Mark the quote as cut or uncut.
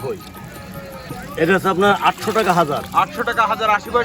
cut